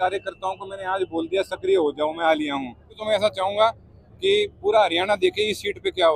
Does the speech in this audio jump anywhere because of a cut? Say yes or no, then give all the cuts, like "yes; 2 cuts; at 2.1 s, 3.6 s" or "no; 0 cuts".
yes; 1 cut; at 3.0 s